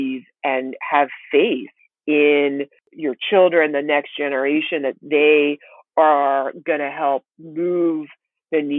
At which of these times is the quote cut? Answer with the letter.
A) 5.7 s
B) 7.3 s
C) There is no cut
C